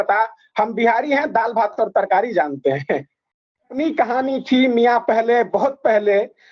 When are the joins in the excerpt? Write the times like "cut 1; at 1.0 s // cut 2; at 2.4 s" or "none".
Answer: cut 1; at 3.8 s